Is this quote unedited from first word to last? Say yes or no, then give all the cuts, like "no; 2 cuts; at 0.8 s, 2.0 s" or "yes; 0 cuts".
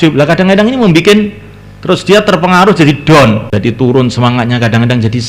no; 1 cut; at 3.5 s